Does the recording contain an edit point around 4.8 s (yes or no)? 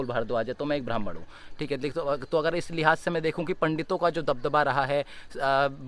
no